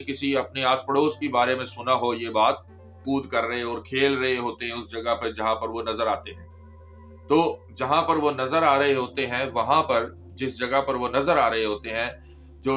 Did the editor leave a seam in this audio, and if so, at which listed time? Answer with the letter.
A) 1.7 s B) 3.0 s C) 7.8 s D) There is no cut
B